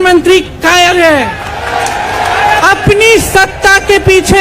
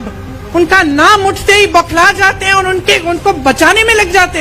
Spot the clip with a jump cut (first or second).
first